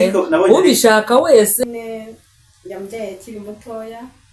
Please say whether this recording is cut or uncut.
cut